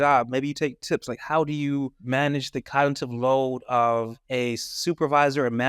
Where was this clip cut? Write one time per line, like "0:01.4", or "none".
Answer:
0:02.0
0:04.2